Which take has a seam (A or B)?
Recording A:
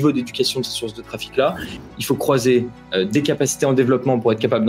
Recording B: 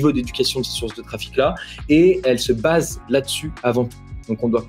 A